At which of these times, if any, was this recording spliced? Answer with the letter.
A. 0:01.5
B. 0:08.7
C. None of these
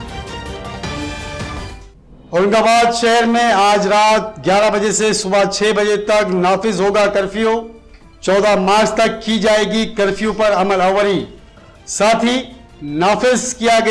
A